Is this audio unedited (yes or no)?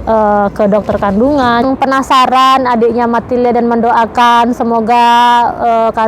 no